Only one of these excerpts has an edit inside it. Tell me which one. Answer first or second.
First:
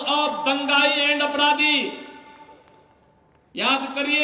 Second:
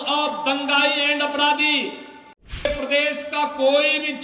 second